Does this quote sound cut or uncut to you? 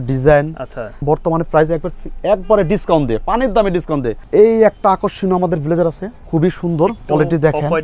cut